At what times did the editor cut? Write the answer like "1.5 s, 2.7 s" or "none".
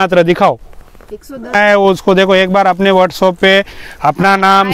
1.6 s